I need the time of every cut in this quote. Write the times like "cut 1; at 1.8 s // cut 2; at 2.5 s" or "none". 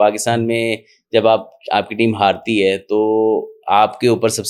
none